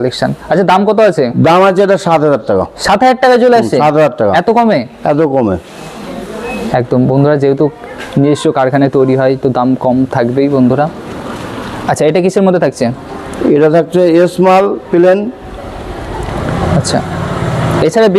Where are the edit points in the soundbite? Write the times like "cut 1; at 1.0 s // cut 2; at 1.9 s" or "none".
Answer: none